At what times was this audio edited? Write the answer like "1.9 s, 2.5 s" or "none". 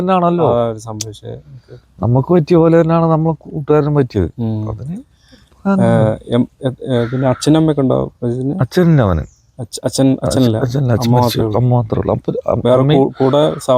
none